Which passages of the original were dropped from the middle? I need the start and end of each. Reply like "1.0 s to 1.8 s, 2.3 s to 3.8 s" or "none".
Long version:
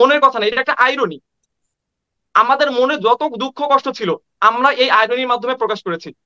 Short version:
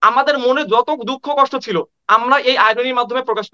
none